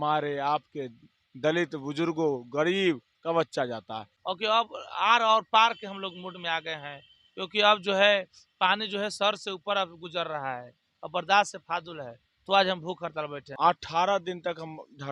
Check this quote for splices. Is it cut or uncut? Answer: cut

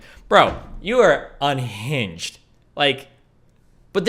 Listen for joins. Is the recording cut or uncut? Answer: uncut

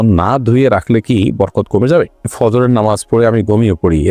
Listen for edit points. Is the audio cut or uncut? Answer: cut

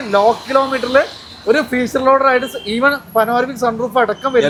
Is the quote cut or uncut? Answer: uncut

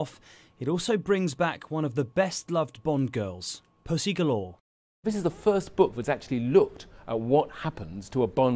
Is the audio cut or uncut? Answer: cut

